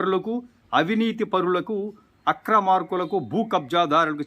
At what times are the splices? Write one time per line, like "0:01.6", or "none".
none